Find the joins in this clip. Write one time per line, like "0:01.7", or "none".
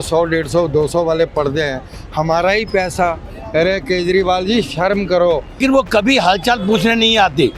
0:05.6